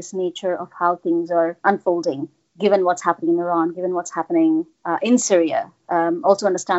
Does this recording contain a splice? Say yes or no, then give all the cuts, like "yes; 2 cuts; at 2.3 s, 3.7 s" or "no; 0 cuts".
yes; 1 cut; at 1.6 s